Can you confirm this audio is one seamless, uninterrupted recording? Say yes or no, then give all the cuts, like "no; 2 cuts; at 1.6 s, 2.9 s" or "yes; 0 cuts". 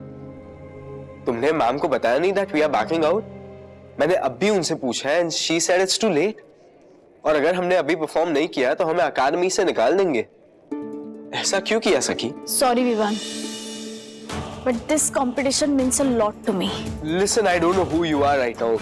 yes; 0 cuts